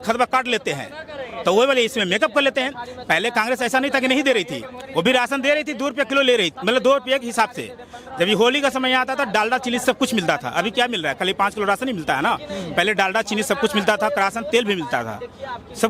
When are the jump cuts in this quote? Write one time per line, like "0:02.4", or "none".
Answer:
none